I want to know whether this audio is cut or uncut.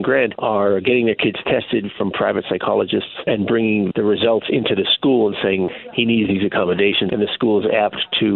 cut